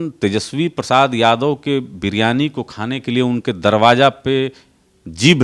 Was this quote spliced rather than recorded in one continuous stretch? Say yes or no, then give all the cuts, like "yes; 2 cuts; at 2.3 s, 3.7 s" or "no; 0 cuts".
no; 0 cuts